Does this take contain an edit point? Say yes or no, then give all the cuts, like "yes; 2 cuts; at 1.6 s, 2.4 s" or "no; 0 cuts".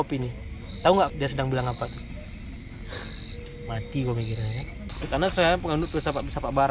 yes; 3 cuts; at 1.1 s, 2.6 s, 5.0 s